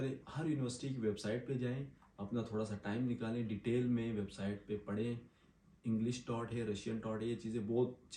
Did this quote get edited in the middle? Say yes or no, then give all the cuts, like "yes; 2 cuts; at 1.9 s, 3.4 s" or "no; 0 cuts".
no; 0 cuts